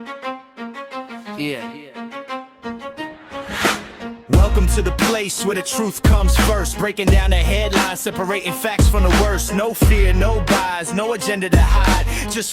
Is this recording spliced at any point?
yes; 1 cut; at 1.1 s

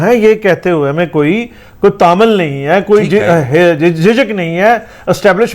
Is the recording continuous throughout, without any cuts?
yes; 0 cuts

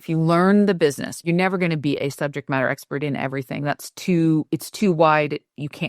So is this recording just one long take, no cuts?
no; 1 cut; at 1.2 s

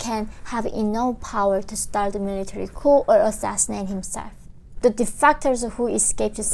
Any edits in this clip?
yes; 1 cut; at 4.8 s

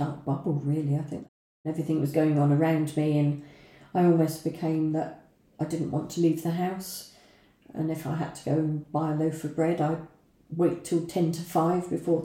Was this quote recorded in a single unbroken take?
no; 1 cut; at 1.3 s

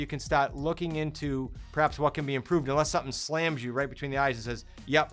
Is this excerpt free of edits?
yes; 0 cuts

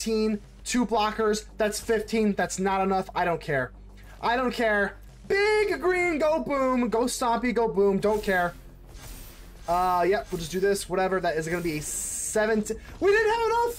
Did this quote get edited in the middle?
no; 0 cuts

